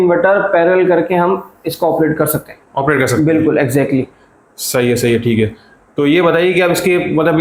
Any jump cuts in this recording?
no; 0 cuts

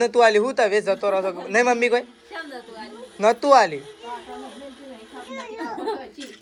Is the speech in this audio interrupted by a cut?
no; 0 cuts

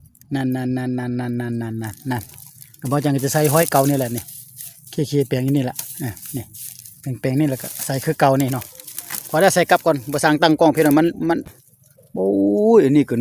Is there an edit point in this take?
yes; 1 cut; at 11.5 s

